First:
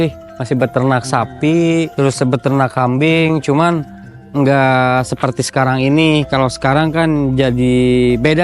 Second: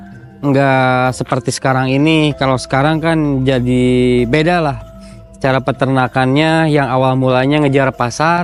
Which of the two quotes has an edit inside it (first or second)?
first